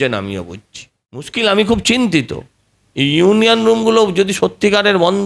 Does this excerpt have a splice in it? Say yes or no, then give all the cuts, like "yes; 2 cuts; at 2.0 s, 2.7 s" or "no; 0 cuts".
yes; 1 cut; at 1.3 s